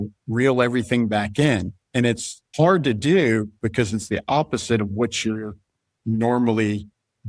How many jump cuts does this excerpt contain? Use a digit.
1